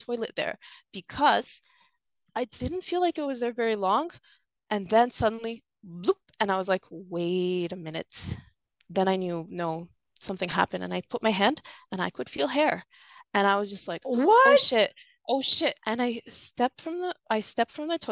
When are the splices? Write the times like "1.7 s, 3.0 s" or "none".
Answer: 2.1 s, 15.8 s